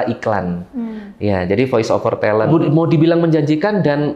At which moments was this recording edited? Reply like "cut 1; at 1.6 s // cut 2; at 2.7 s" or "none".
cut 1; at 2.5 s

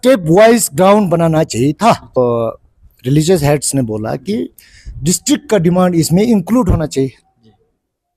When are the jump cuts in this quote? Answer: cut 1; at 2.2 s

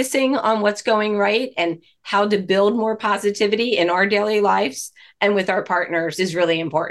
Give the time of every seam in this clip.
none

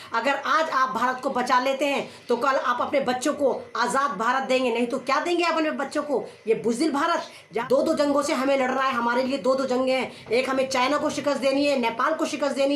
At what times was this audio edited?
cut 1; at 7.5 s

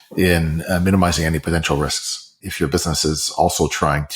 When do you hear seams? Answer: cut 1; at 2.4 s

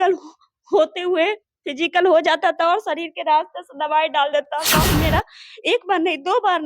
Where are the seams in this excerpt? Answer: cut 1; at 4.9 s

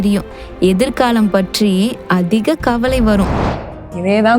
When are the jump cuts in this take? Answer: cut 1; at 3.5 s

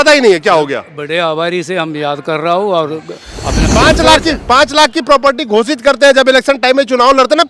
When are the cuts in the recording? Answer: cut 1; at 3.6 s

